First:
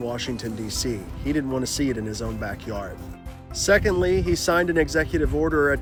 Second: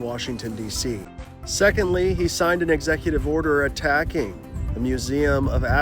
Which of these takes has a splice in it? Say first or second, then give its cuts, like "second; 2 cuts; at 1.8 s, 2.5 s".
second; 1 cut; at 1.1 s